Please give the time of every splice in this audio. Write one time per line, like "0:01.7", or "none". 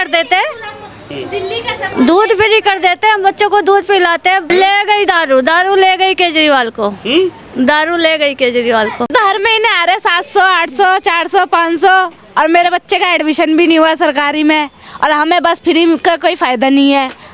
0:04.5
0:09.1